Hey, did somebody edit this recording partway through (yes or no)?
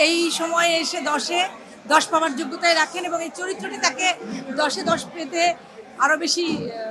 no